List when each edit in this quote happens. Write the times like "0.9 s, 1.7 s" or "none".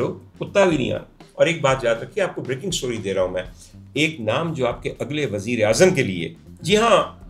1.2 s

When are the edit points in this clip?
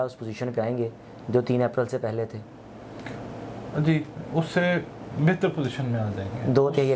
none

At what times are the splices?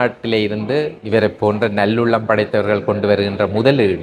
none

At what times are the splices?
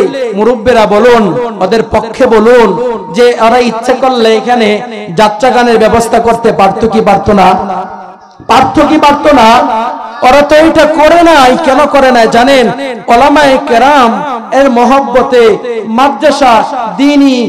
none

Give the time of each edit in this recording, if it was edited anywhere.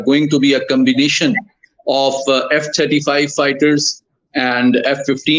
none

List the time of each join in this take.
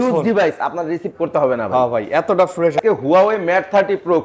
2.8 s

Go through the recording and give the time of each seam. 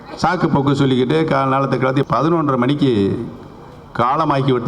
2.1 s

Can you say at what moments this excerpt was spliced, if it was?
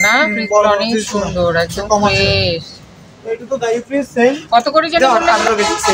5.0 s

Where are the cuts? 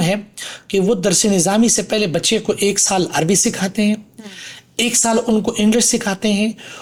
none

